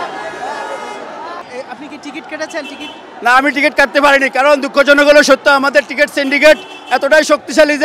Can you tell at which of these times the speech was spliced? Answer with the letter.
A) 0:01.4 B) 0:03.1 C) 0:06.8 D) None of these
A